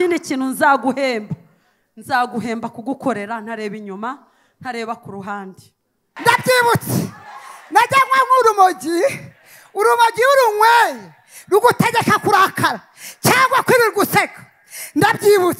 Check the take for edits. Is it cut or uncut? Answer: cut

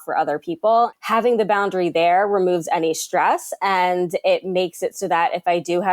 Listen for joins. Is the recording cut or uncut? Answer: cut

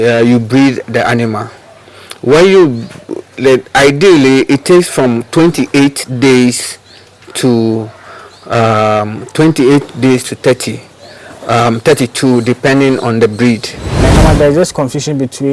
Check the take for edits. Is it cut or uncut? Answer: cut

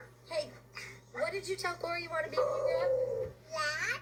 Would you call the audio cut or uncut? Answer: uncut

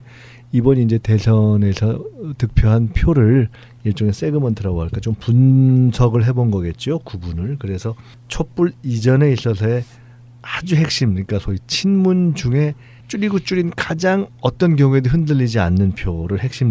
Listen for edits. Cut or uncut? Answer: cut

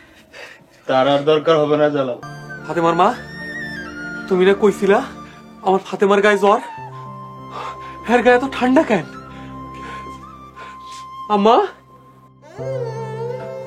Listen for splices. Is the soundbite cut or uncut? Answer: cut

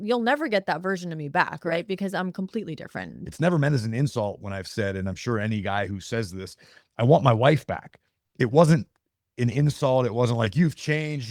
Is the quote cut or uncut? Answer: cut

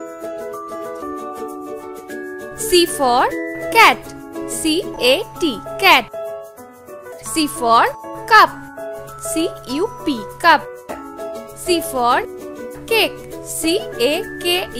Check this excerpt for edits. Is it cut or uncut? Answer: cut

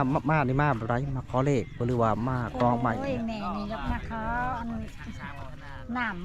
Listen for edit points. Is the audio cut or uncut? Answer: uncut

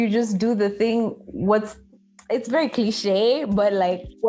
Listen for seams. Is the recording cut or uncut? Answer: uncut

